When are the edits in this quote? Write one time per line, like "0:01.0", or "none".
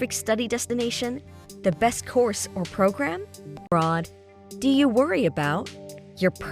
0:03.7